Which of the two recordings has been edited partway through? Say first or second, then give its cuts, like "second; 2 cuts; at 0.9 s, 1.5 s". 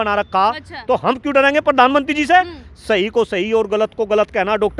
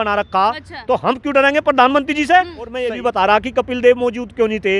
second; 1 cut; at 3.1 s